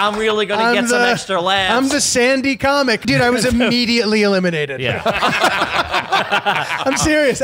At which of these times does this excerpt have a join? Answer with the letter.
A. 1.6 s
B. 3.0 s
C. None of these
B